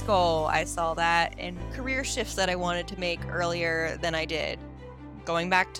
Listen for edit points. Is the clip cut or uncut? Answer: cut